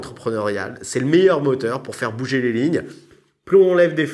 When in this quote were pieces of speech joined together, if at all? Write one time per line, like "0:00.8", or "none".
0:03.1